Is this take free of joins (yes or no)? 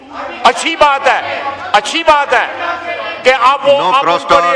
yes